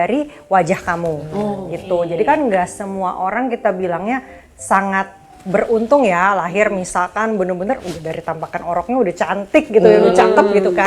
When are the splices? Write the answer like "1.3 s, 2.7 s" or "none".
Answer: none

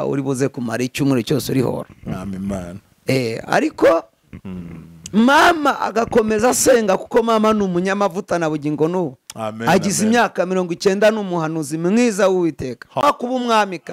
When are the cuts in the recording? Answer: 13.0 s

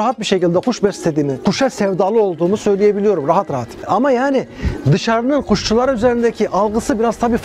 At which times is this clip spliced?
1.4 s, 3.8 s

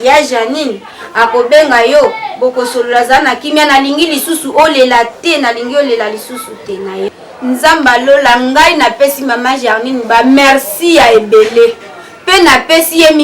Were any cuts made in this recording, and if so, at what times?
7.1 s

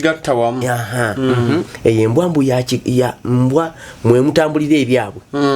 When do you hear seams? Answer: 1.7 s

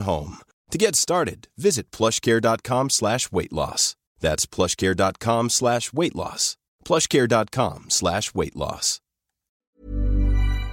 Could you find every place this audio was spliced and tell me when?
9.7 s

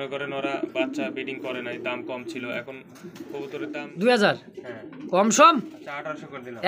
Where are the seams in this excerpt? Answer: 3.8 s

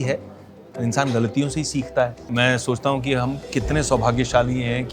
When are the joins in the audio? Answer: 2.2 s

